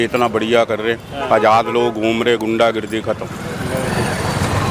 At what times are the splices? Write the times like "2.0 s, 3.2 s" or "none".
none